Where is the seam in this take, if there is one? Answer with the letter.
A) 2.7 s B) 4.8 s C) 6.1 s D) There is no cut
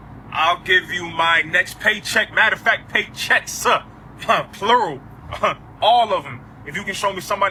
D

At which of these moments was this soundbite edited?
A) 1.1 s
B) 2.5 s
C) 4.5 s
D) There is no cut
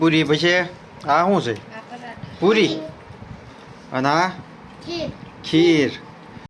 D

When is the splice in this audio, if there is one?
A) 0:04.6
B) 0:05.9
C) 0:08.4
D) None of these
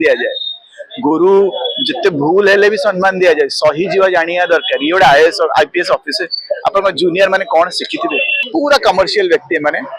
C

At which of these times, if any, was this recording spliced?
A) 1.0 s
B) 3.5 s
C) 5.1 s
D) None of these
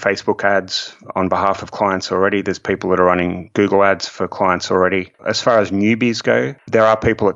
C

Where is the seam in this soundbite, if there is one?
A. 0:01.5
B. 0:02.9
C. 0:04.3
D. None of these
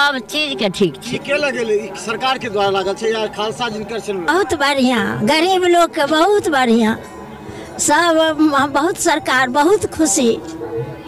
C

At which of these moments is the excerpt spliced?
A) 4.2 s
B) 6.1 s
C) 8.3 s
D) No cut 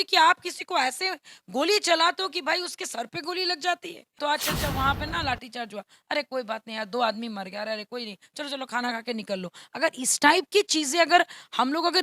A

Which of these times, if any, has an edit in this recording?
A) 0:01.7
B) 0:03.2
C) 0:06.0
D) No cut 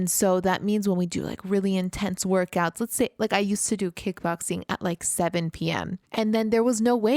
C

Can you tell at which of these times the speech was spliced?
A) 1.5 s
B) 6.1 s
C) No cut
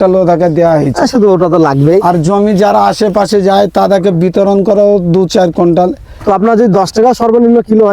B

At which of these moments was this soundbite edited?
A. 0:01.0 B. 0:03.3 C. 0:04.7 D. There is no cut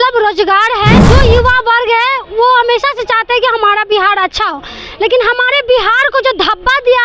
A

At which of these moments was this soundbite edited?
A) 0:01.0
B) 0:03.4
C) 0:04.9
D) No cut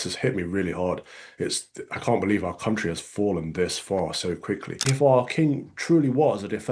C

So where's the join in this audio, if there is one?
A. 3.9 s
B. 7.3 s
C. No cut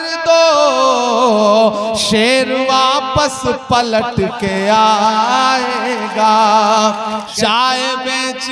B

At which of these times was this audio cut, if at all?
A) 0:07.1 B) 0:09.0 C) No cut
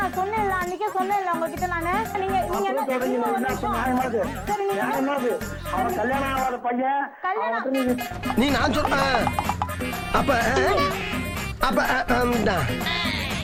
C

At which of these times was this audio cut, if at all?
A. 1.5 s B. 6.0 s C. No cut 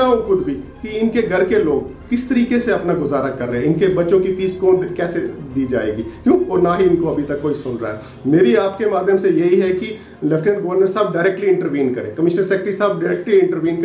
C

